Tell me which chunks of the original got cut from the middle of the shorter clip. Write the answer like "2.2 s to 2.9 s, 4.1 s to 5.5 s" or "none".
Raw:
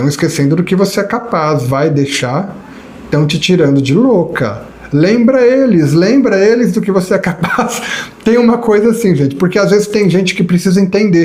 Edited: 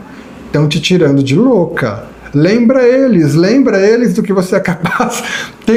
none